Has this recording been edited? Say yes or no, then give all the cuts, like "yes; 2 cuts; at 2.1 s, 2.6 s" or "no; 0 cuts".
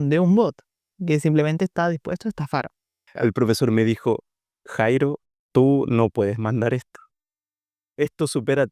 yes; 1 cut; at 3.0 s